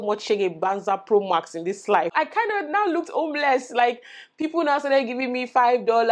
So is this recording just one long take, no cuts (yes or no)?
no